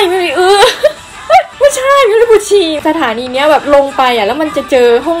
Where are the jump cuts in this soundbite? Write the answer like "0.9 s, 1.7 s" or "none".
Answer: 1.5 s, 2.8 s